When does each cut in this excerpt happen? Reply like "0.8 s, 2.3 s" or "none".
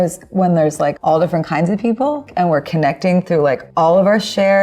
1.0 s, 2.3 s, 3.6 s